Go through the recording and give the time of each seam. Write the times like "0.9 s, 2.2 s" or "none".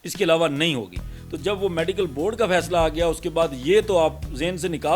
none